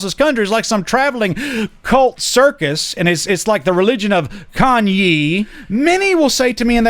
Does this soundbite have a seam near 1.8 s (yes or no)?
no